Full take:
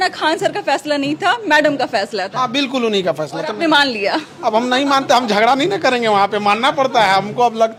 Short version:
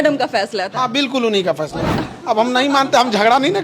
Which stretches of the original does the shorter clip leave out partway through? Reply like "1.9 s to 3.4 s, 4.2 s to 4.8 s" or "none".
3.6 s to 4.1 s